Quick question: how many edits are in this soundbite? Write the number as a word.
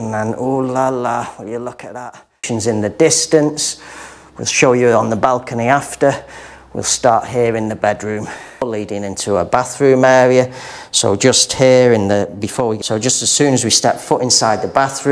three